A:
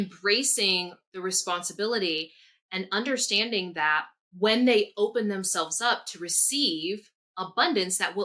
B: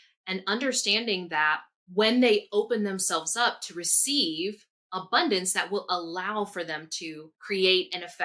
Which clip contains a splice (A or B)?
B